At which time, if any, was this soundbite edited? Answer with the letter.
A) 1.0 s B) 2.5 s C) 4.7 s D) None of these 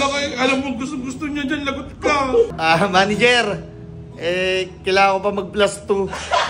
B